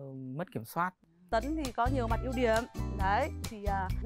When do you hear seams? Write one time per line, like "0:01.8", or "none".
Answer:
0:01.2